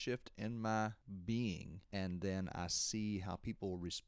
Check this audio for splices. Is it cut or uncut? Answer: cut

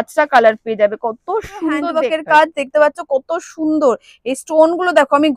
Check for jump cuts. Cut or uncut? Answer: cut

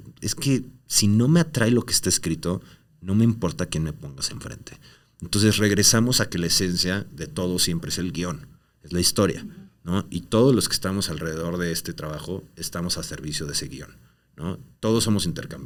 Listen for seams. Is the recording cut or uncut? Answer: uncut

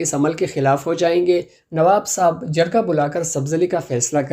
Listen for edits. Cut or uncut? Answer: uncut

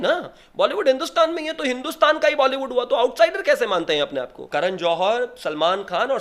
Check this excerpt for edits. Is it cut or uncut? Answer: cut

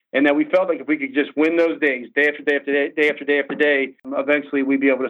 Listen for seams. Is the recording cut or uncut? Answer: cut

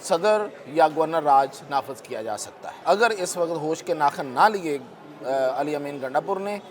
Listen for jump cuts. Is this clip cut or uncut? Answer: cut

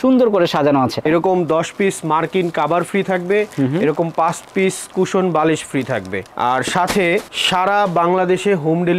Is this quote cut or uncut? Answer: cut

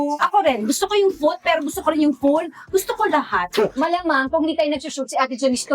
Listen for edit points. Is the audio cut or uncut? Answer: cut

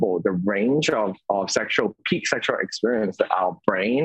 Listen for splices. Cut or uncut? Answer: uncut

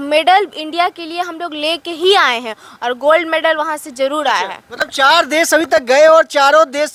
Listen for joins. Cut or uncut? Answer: uncut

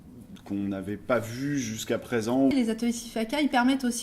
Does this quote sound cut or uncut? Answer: cut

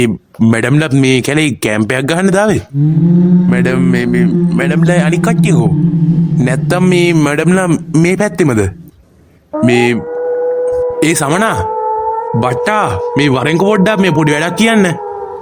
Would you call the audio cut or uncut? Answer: uncut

